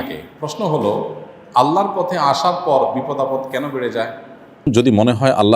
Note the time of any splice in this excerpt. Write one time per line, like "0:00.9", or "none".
0:04.7